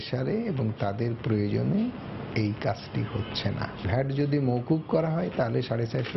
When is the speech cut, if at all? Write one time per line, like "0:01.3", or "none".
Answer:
none